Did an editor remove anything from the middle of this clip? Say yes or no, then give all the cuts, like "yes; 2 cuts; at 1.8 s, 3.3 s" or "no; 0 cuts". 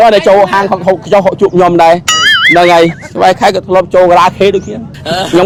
no; 0 cuts